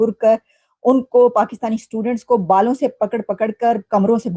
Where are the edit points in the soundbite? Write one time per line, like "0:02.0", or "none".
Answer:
none